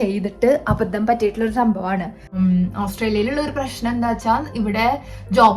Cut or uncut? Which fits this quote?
cut